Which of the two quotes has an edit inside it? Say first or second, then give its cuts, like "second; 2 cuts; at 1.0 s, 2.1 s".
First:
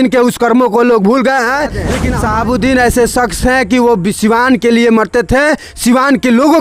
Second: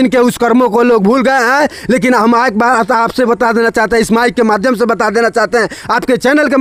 first; 1 cut; at 2.0 s